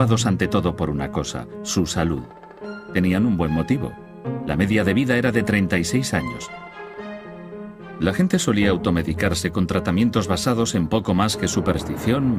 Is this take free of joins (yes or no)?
no